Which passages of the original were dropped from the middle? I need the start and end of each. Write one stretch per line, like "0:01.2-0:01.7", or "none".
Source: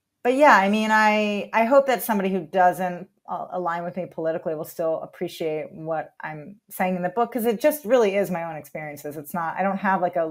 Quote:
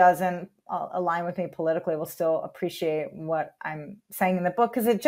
none